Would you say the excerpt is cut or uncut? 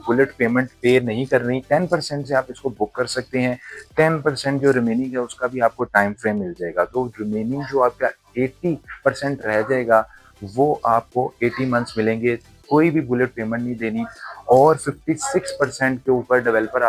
uncut